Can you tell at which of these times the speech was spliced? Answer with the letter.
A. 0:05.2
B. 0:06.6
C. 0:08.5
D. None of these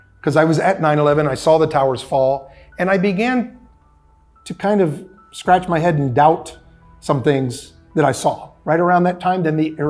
C